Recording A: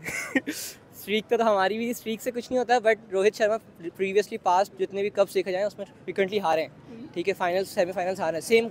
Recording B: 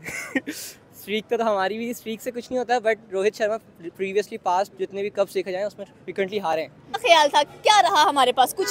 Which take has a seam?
B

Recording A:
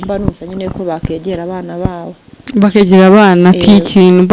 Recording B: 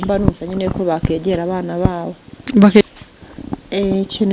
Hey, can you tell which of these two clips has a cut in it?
B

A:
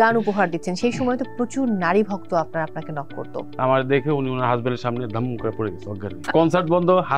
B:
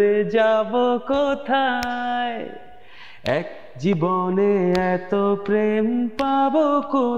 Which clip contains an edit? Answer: A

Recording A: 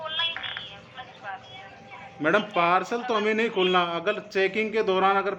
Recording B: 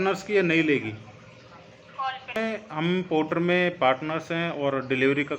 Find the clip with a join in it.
B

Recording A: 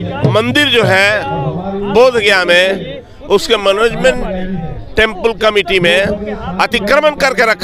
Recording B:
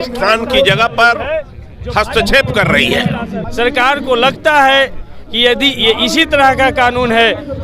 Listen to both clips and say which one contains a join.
B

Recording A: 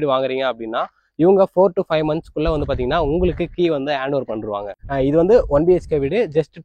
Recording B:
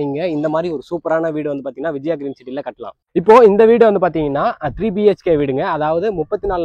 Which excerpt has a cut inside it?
A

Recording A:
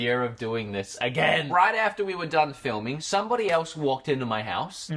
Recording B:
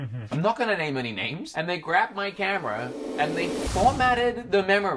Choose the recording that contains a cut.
A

